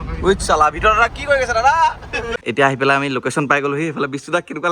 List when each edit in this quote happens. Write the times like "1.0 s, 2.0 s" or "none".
2.3 s